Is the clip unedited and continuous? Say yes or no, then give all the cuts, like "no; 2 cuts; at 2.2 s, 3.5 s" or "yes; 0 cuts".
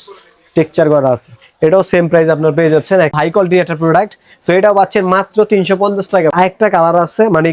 no; 2 cuts; at 3.1 s, 6.3 s